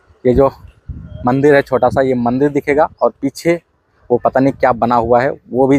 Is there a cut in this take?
no; 0 cuts

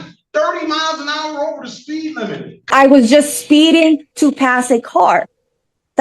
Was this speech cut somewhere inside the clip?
yes; 1 cut; at 2.7 s

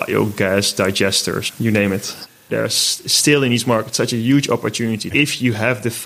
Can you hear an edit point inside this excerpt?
yes; 2 cuts; at 2.4 s, 5.1 s

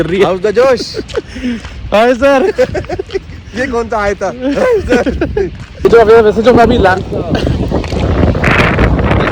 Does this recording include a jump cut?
yes; 1 cut; at 5.8 s

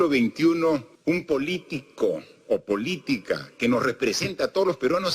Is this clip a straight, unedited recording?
no; 1 cut; at 0.9 s

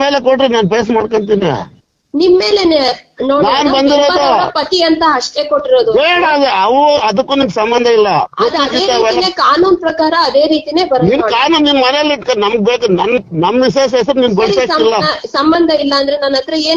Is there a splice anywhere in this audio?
no; 0 cuts

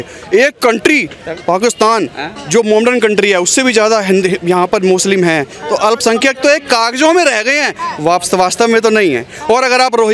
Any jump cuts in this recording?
no; 0 cuts

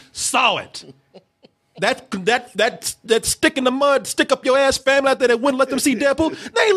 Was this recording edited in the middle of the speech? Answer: no; 0 cuts

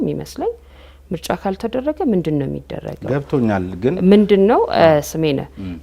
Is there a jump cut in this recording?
no; 0 cuts

